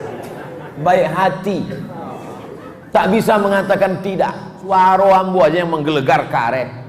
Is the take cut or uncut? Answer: cut